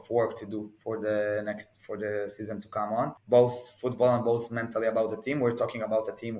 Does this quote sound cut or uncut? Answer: cut